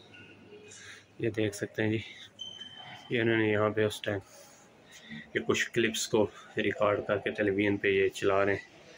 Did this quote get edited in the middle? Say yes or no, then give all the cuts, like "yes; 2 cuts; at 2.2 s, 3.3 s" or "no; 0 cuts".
no; 0 cuts